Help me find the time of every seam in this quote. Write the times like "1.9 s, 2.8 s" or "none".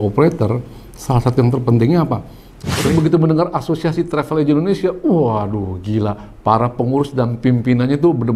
2.9 s